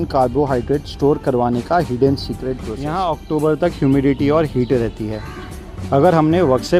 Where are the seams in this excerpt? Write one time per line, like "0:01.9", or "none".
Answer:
0:02.8